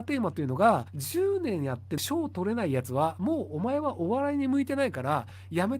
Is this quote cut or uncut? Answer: cut